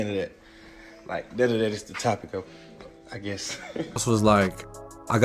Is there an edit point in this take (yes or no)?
yes